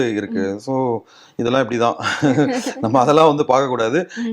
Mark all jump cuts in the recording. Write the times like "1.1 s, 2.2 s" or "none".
none

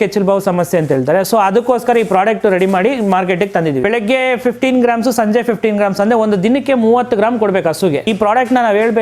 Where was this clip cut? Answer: 3.8 s, 8.0 s

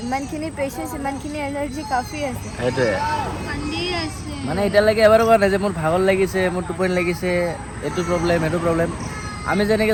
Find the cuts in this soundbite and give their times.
none

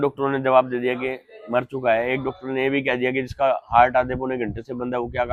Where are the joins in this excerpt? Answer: none

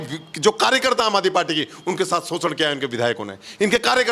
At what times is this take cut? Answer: none

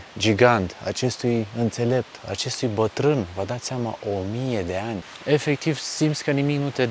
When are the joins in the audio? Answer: 5.1 s

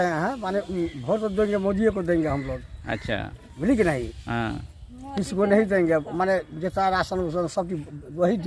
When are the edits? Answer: none

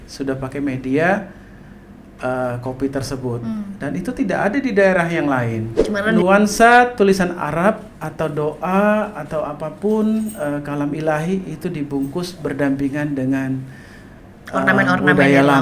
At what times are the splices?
6.2 s

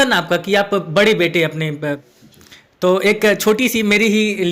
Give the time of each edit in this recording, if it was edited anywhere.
2.0 s

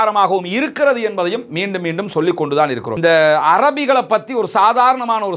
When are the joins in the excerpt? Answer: 2.9 s

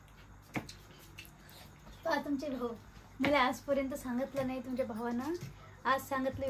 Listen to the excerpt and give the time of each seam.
none

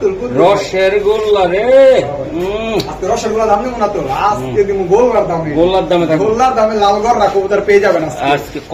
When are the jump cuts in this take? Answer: none

